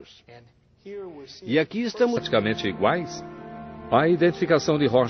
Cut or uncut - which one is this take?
uncut